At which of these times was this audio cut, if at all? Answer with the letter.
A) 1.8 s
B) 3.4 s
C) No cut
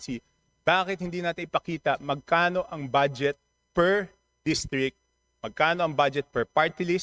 C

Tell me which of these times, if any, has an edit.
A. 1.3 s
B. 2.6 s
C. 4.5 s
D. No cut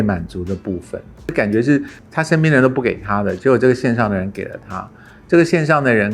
A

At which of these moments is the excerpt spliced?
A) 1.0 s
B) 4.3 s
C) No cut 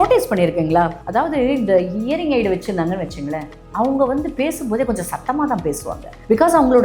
A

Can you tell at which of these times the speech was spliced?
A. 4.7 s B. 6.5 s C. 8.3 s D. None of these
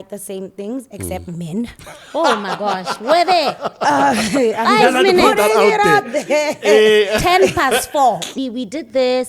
C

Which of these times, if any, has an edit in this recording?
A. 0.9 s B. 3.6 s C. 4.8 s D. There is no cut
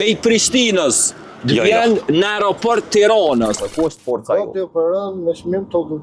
B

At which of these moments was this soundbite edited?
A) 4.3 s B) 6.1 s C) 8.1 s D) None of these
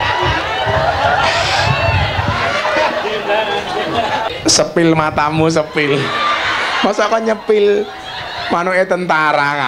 A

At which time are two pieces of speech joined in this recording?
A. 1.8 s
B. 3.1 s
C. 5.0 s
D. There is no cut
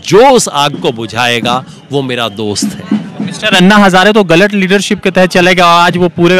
D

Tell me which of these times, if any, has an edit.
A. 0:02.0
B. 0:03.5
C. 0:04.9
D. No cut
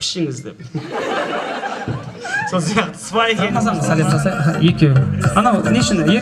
B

